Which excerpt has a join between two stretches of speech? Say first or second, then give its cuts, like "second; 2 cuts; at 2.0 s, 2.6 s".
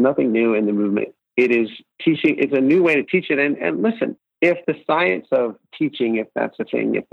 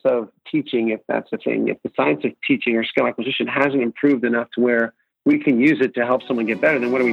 first; 3 cuts; at 1.2 s, 1.8 s, 4.2 s